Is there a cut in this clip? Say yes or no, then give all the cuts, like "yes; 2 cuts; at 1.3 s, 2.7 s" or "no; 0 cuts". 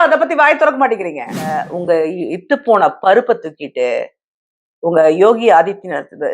yes; 1 cut; at 1.7 s